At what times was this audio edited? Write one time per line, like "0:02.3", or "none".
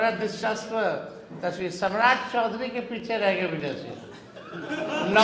none